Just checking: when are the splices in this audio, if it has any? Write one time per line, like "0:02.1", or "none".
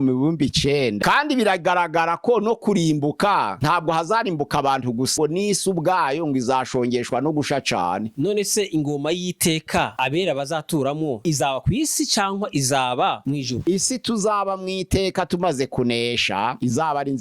0:01.0
0:05.1
0:08.1
0:13.6

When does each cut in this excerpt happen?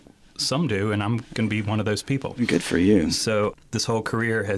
none

